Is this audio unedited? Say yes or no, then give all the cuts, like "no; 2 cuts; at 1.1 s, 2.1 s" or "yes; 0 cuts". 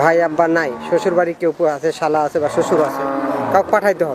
yes; 0 cuts